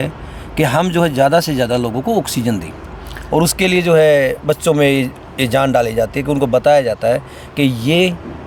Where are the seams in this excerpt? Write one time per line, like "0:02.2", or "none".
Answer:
none